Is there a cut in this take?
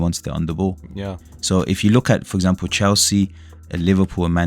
yes; 1 cut; at 0.9 s

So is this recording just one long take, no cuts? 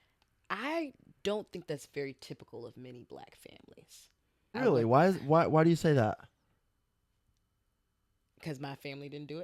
no; 1 cut; at 4.5 s

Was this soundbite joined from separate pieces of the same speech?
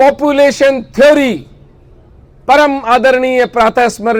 no; 0 cuts

